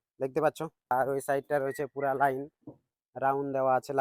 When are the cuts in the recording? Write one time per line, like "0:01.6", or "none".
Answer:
0:00.9